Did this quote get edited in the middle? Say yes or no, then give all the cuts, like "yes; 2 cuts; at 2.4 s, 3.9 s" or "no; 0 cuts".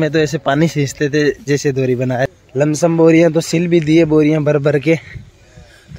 yes; 1 cut; at 2.4 s